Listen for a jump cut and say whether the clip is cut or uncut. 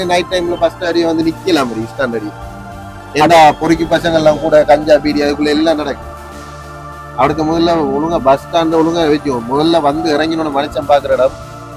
uncut